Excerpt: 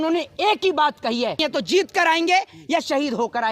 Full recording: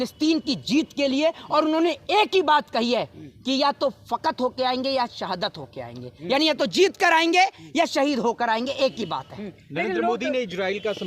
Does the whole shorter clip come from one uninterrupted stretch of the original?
no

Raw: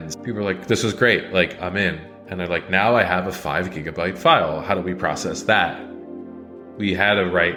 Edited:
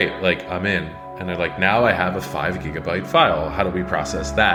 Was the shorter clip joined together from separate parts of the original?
no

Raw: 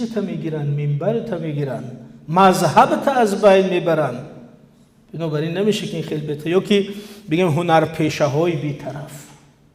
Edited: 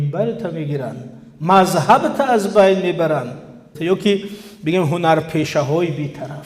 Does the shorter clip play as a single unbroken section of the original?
no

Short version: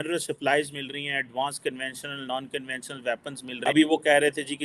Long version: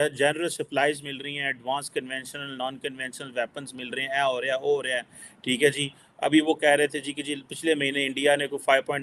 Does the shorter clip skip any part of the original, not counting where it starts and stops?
yes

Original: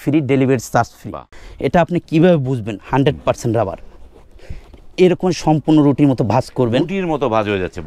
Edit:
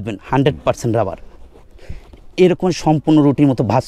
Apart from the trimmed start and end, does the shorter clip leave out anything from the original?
no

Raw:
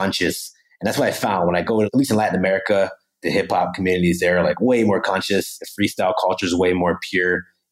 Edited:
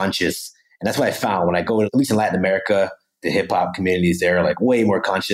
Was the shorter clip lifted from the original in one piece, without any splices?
yes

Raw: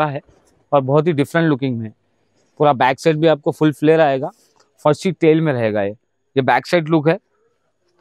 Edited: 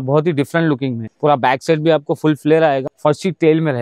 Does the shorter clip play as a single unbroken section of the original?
no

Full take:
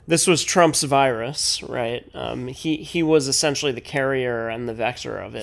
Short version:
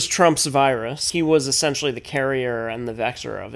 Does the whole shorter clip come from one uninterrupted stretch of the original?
no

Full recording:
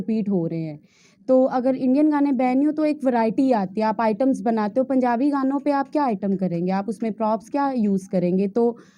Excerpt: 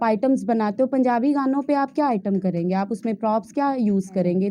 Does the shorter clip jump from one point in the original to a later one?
no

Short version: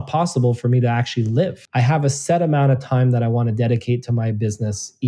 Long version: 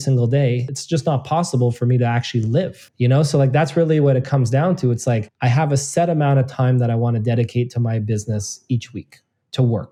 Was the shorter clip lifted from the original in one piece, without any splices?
no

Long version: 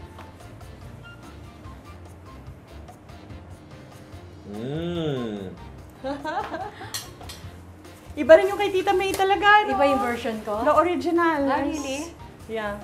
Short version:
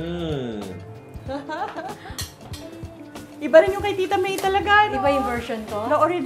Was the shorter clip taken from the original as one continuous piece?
yes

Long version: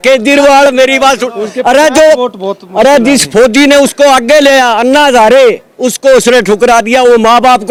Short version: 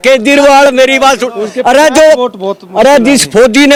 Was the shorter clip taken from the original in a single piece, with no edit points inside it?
yes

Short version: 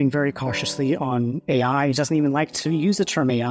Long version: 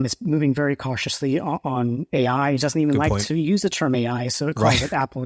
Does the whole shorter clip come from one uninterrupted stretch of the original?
no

